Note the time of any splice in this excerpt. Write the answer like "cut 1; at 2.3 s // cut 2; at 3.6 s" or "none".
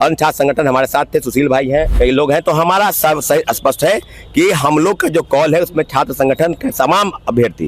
cut 1; at 1.9 s